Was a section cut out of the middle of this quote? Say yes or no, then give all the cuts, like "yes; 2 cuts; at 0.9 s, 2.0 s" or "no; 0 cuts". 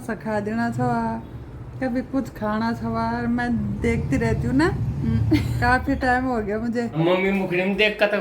yes; 1 cut; at 6.9 s